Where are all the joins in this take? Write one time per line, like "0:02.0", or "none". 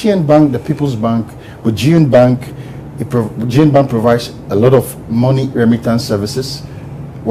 0:05.5